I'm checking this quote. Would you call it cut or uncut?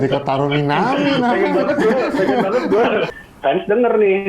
cut